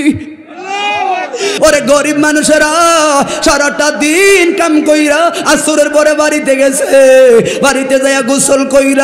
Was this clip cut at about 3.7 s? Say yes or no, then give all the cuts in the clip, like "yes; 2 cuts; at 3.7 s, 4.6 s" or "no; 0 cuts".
no; 1 cut; at 1.6 s